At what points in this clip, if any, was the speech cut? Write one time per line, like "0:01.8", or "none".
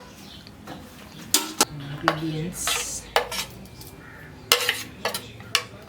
0:01.6